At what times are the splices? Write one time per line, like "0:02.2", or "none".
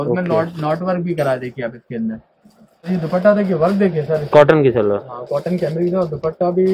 0:02.9